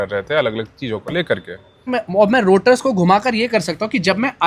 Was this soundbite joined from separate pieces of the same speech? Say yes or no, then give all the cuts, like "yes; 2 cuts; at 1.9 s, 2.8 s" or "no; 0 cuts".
yes; 1 cut; at 1.9 s